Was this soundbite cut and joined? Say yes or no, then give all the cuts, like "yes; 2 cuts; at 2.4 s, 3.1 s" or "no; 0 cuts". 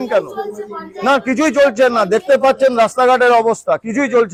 no; 0 cuts